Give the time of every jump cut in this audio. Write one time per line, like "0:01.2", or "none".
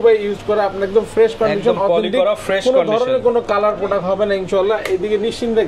none